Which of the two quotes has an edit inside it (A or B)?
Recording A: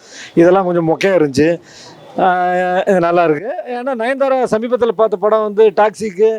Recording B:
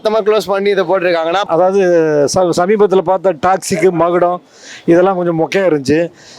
B